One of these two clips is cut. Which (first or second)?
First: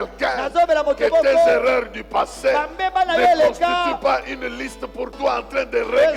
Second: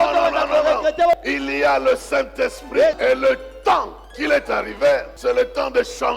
second